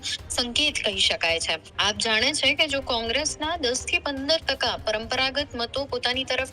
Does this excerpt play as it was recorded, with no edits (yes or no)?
no